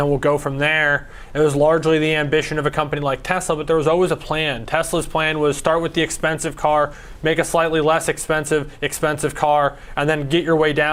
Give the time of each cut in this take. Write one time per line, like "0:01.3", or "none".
none